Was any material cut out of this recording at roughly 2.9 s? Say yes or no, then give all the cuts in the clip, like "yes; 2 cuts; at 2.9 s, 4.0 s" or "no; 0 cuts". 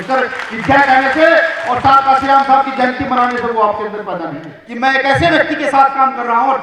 no; 1 cut; at 4.6 s